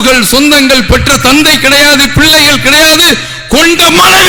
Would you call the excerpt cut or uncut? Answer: uncut